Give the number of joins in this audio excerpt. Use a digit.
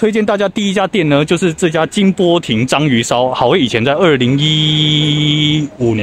0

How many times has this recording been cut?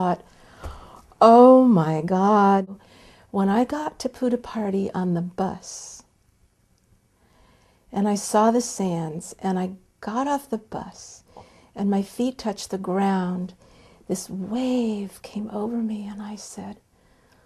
1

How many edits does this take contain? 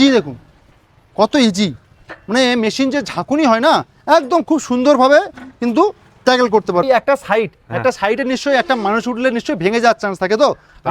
1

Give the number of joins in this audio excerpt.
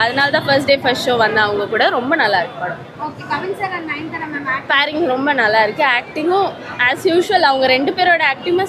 0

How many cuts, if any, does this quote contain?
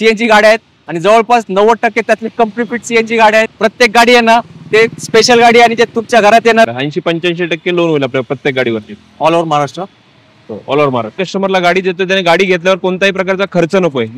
3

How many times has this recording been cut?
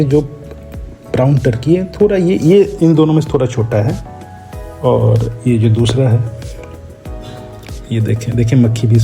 0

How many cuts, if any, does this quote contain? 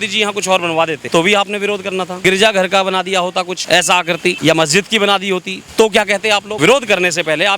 6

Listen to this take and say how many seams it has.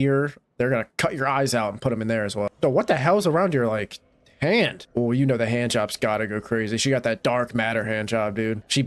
1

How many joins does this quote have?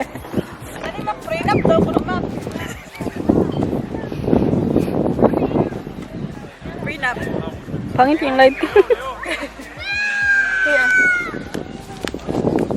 1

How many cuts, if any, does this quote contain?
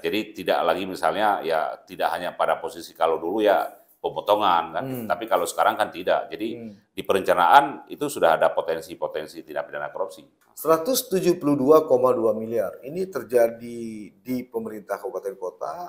1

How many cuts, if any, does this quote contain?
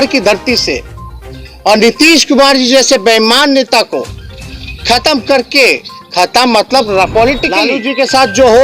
1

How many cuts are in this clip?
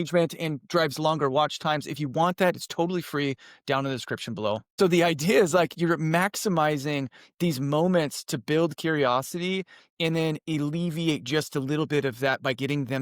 1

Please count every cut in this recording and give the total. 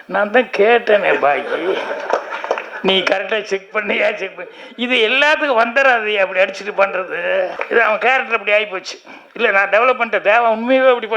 1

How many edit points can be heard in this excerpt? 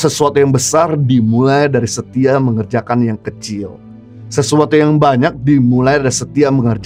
0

